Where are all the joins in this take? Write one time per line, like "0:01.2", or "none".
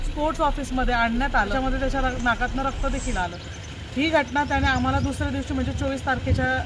0:01.5